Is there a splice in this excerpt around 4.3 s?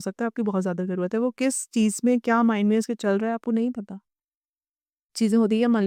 no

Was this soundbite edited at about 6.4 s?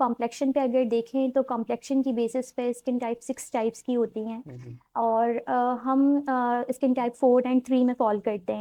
no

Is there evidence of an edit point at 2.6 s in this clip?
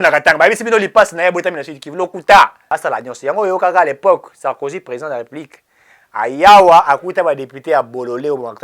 yes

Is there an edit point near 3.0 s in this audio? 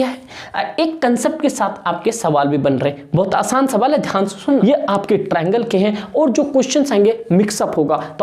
no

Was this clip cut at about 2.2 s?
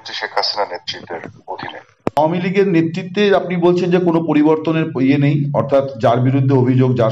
yes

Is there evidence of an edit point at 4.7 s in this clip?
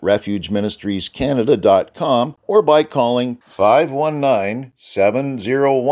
no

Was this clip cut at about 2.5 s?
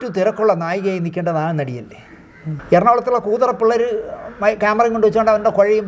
yes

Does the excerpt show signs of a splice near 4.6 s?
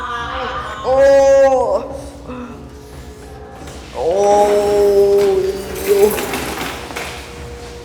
no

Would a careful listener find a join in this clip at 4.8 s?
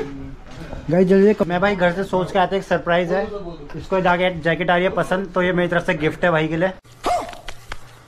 no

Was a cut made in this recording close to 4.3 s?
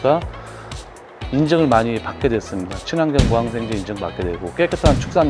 no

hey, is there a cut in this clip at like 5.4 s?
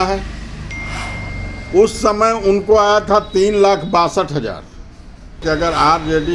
yes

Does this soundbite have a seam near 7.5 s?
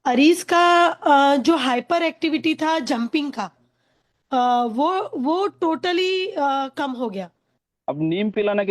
yes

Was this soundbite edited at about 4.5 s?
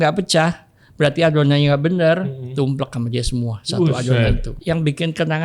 yes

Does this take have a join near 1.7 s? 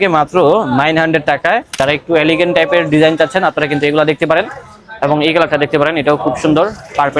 yes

